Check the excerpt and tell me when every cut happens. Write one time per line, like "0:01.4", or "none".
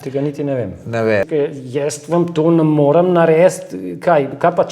0:01.3